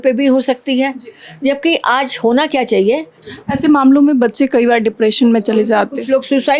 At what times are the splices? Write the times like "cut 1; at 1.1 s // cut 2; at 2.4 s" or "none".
cut 1; at 3.2 s